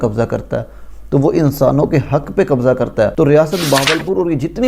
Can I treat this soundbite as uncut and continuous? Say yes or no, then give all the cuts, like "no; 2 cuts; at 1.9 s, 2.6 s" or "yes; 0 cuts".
no; 1 cut; at 3.1 s